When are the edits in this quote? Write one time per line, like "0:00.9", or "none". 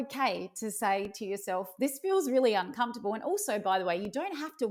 none